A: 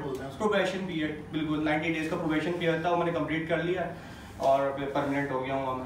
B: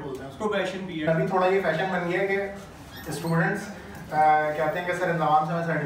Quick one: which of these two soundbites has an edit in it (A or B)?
B